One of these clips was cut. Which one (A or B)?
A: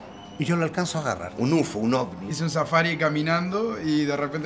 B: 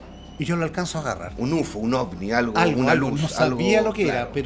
A